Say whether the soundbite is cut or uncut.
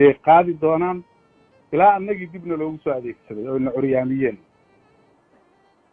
uncut